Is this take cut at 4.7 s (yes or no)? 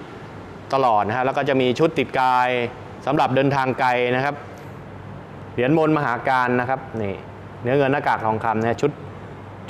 yes